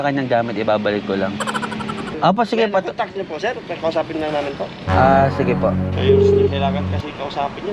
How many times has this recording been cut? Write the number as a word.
one